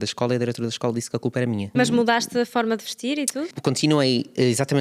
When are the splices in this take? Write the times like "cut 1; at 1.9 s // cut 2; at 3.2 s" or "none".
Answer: cut 1; at 1.7 s // cut 2; at 3.6 s